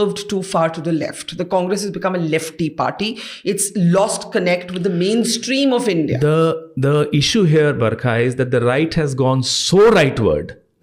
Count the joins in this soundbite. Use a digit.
0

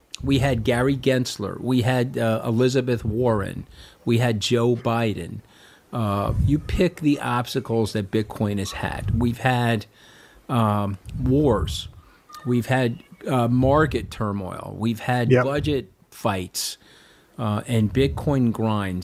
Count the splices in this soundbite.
0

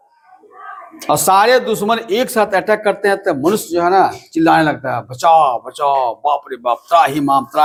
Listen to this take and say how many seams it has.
0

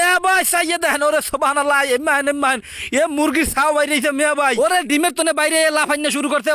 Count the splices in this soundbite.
0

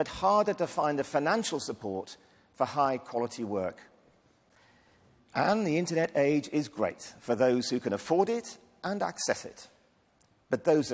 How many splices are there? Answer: 1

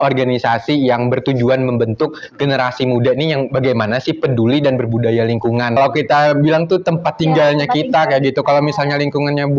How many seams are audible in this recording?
1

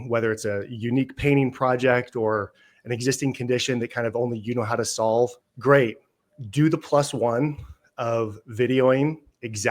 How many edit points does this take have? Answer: 1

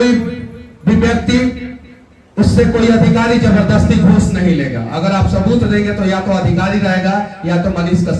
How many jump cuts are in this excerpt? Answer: 0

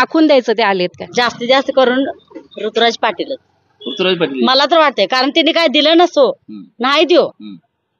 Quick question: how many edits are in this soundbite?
1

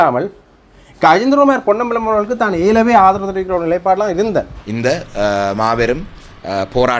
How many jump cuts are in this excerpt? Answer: 1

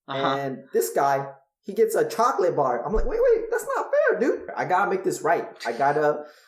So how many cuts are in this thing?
1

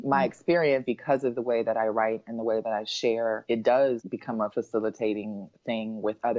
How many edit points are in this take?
3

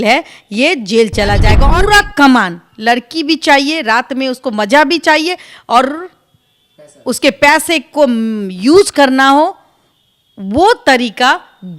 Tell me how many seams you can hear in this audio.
1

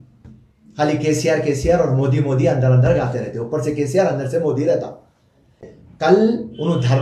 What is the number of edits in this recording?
1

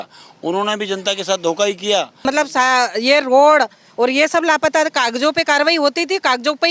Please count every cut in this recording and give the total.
1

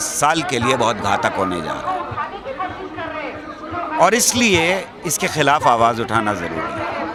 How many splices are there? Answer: 0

